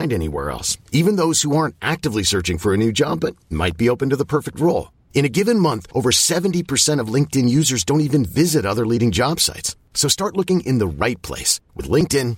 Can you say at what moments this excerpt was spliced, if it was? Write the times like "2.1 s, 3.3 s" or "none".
none